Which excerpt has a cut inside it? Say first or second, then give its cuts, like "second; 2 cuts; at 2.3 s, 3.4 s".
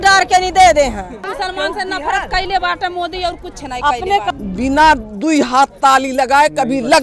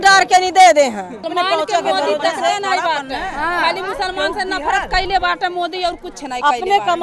first; 2 cuts; at 1.2 s, 4.3 s